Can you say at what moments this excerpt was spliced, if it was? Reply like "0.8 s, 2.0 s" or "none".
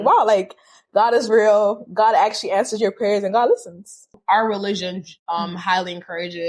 4.1 s